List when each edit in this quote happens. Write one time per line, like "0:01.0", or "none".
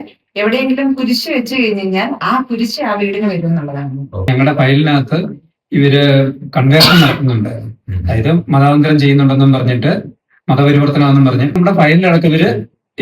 0:04.3
0:11.6